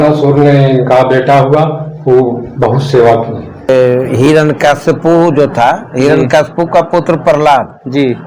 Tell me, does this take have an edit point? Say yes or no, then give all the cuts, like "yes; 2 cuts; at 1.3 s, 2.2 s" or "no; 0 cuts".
yes; 1 cut; at 3.7 s